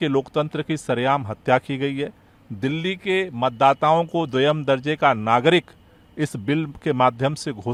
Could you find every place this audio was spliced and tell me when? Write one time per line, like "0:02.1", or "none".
none